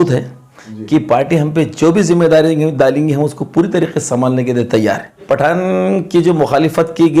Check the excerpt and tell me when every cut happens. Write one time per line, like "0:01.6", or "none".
0:05.2